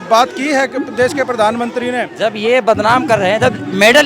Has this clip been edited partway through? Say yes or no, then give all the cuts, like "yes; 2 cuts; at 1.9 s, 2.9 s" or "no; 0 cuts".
yes; 1 cut; at 2.1 s